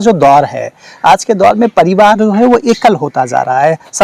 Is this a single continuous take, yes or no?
yes